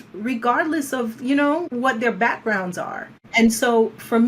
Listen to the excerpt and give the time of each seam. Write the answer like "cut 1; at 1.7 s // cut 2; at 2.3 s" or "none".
cut 1; at 1.7 s // cut 2; at 3.2 s